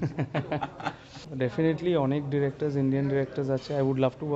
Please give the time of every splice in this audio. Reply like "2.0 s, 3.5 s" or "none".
1.2 s